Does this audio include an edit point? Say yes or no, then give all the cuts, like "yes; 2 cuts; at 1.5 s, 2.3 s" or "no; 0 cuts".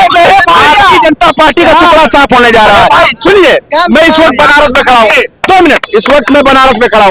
no; 0 cuts